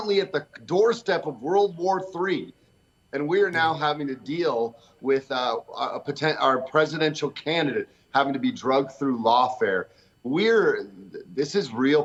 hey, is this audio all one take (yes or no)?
yes